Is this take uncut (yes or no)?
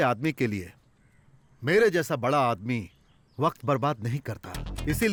yes